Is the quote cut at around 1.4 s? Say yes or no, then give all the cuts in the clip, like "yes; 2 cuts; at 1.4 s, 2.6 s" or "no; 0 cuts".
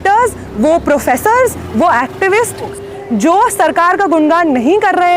no; 1 cut; at 2.7 s